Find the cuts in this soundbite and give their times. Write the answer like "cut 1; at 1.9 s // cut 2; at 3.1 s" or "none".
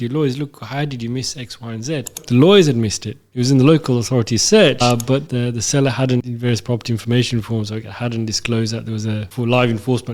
cut 1; at 2.2 s // cut 2; at 4.8 s // cut 3; at 6.2 s // cut 4; at 9.3 s